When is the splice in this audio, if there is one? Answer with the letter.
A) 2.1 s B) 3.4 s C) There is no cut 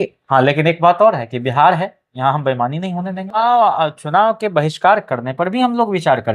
B